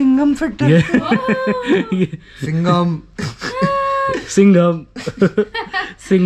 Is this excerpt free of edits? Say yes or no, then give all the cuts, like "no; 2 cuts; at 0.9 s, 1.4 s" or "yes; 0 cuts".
yes; 0 cuts